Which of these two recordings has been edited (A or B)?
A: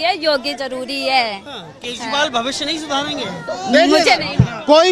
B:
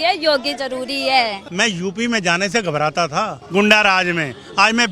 B